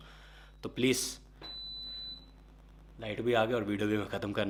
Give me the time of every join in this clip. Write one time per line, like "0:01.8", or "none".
none